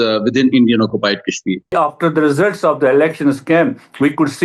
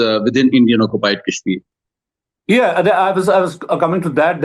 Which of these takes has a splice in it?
first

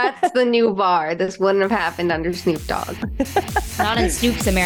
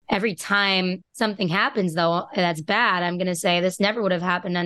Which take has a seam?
second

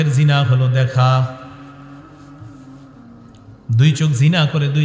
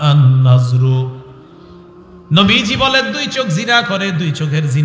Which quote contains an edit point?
first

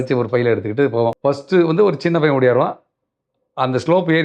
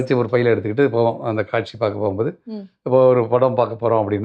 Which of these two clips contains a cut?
first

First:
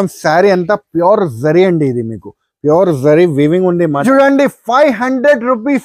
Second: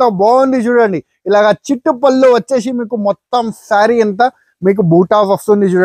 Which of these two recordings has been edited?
first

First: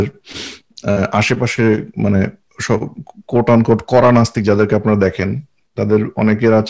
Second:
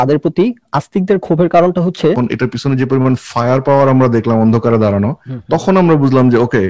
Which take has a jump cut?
second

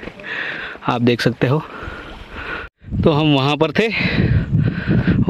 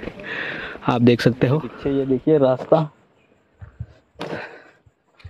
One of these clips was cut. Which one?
second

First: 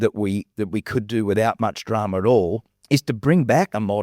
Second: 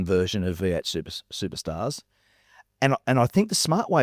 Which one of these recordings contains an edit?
first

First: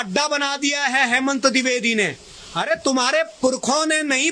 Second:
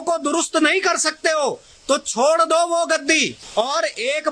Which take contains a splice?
second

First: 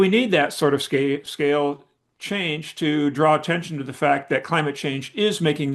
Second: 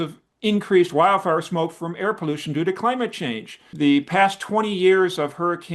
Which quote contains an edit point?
second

